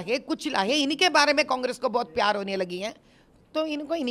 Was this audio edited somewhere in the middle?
no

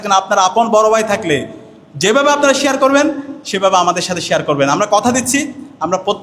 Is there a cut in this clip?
no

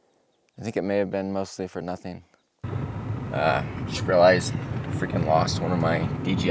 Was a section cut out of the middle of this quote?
yes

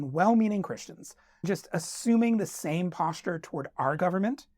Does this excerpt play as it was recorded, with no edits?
no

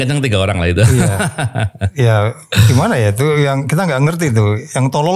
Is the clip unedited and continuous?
yes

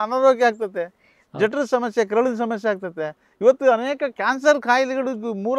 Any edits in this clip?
no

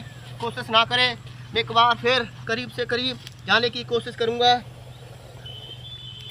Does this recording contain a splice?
no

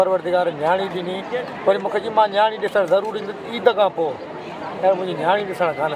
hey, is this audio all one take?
yes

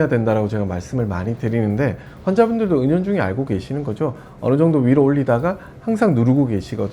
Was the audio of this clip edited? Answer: no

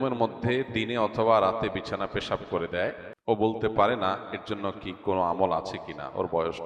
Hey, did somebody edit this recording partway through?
yes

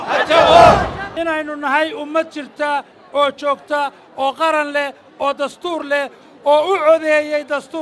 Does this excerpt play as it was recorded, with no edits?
no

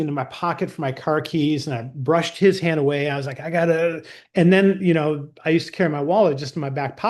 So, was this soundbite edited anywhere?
yes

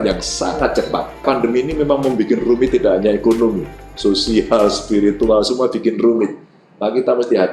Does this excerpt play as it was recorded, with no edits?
no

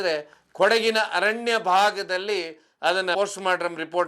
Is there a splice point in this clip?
yes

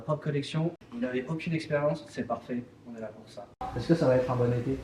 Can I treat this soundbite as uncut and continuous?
no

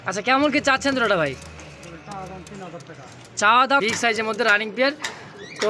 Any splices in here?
yes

